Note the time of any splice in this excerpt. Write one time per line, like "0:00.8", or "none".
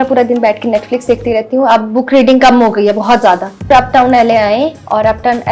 0:03.7

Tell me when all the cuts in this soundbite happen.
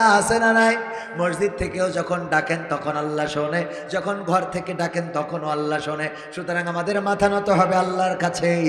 none

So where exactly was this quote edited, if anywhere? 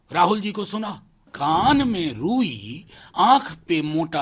0:01.3

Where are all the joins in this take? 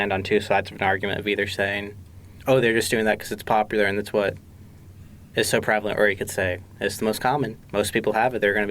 0:07.6

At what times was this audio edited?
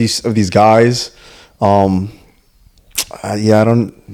none

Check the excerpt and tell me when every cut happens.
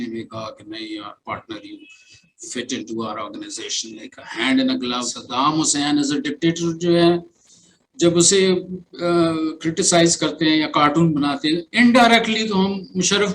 0:05.1

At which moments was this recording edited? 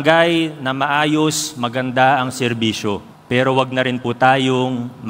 0:03.1

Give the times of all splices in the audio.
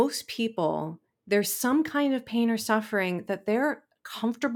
none

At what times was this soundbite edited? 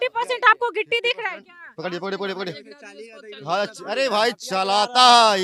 none

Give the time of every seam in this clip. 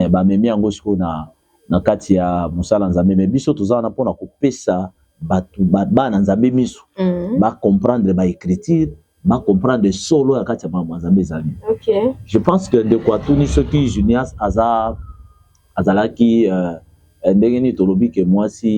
none

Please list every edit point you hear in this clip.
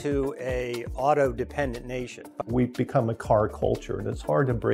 0:02.2

